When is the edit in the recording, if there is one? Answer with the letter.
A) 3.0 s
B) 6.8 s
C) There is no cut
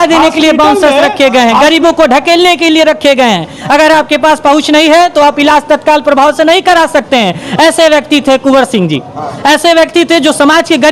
C